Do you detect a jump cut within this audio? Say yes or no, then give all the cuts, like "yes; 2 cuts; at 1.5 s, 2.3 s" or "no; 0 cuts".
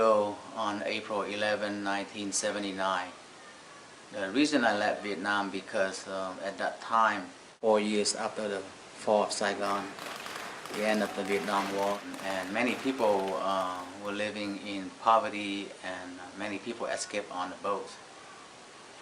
yes; 1 cut; at 2.9 s